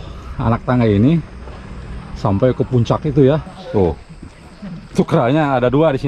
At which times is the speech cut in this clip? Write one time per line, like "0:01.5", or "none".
0:03.5